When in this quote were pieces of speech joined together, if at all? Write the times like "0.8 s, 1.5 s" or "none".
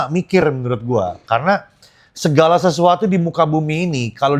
none